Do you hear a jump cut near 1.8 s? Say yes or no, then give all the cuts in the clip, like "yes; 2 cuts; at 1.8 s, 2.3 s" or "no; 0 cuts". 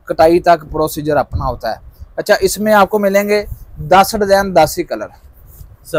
no; 0 cuts